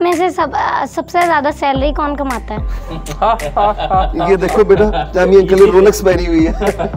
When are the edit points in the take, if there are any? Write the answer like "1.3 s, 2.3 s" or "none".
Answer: none